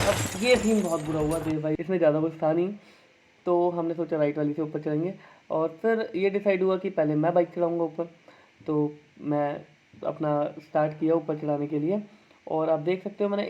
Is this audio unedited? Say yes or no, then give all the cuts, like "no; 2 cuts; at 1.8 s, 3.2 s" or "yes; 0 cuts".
no; 1 cut; at 1.8 s